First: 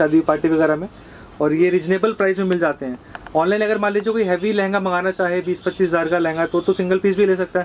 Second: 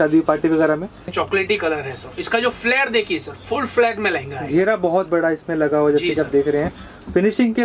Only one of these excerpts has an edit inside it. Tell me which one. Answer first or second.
second